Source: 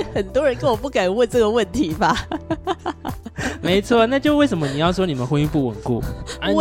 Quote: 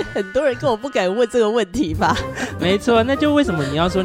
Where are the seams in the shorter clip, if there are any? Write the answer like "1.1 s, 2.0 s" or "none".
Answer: 2.3 s